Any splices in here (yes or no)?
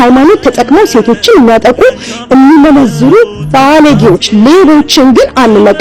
no